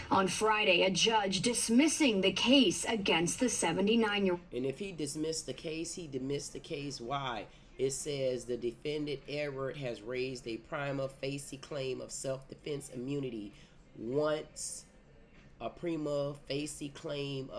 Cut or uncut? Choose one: uncut